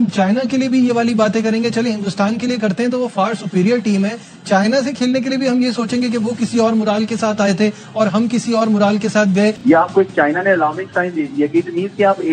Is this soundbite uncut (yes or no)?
no